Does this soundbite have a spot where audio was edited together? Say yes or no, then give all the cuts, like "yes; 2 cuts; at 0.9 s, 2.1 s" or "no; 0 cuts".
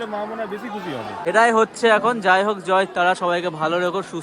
yes; 1 cut; at 1.2 s